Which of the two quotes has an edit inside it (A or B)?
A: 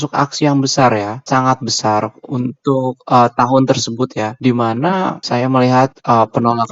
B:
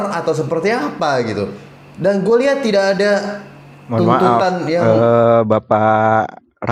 A